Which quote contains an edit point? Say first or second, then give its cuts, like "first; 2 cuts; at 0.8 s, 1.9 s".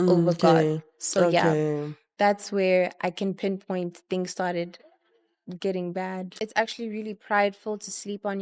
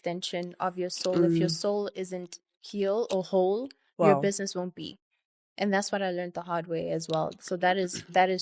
first; 1 cut; at 6.3 s